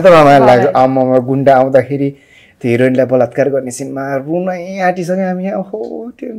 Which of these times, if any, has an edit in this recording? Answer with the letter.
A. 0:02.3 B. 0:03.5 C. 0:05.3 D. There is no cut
D